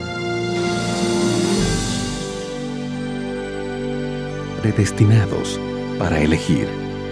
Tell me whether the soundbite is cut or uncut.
uncut